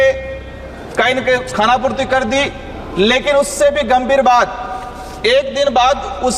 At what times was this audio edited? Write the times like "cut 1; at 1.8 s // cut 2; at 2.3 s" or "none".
none